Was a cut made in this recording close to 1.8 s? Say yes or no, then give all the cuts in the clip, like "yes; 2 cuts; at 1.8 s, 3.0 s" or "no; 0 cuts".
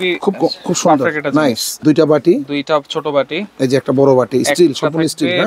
yes; 1 cut; at 1.8 s